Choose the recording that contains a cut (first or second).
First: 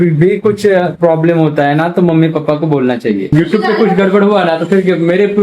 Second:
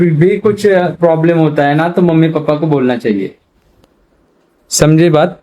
first